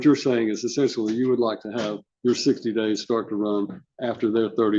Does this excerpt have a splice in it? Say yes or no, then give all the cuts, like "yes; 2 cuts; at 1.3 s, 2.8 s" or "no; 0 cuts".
no; 0 cuts